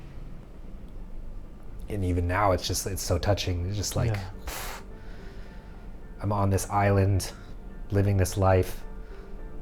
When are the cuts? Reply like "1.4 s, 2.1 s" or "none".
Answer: none